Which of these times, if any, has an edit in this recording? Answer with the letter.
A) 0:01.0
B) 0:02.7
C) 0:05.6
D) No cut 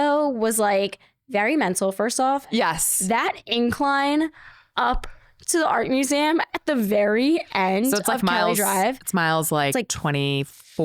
B